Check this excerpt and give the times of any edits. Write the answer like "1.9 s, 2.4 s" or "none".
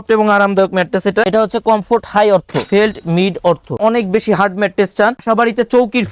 1.3 s, 2.7 s, 3.8 s, 5.2 s

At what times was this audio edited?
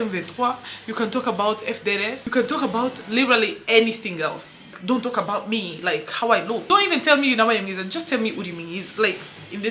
2.2 s, 4.7 s, 6.6 s

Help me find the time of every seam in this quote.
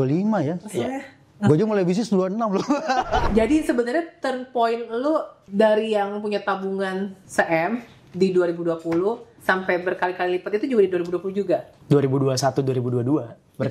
3.3 s, 5.4 s, 7.2 s, 9.3 s, 11.7 s

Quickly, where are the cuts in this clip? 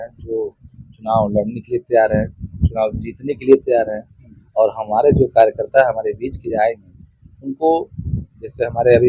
none

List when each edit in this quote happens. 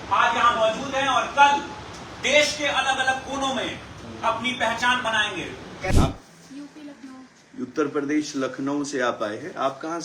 5.9 s

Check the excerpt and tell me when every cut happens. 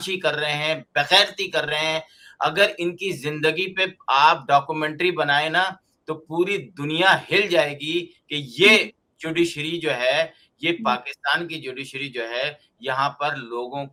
none

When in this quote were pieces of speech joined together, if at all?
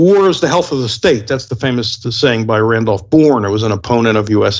none

